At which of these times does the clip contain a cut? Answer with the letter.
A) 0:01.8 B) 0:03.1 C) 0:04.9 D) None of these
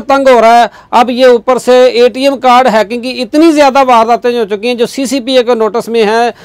D